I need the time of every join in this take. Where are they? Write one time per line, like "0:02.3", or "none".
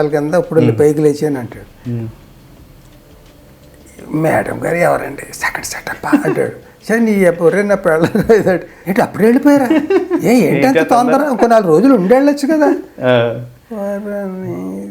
0:08.8